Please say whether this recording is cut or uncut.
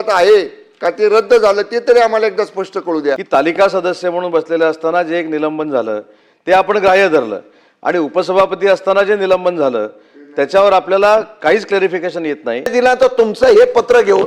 cut